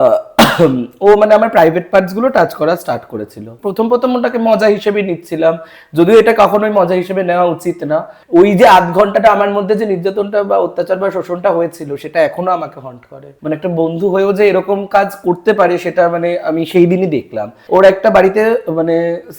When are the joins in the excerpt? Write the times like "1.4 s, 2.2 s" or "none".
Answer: 3.5 s, 8.2 s, 13.3 s, 17.5 s